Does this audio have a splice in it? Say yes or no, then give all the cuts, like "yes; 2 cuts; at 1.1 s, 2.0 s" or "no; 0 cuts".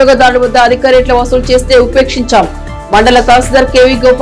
no; 0 cuts